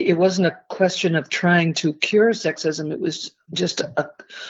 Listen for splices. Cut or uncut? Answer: uncut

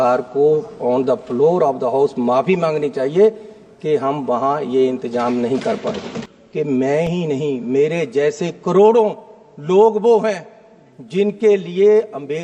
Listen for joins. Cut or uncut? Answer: cut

